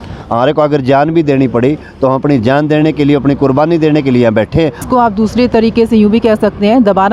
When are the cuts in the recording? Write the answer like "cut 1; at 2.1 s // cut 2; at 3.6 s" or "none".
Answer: cut 1; at 4.8 s